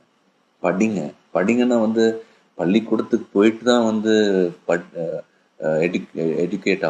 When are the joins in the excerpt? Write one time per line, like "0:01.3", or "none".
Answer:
0:03.6